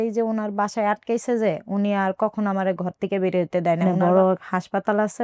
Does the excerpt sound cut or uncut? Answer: cut